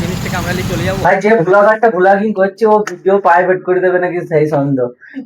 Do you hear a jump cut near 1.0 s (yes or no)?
yes